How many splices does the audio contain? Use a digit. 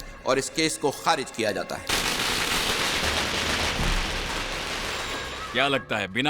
2